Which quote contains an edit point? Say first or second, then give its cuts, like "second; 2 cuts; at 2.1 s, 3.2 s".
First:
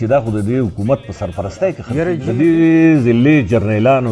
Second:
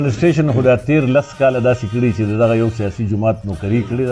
first; 1 cut; at 2.2 s